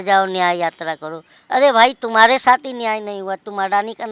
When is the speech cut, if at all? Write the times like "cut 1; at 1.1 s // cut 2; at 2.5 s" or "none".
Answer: none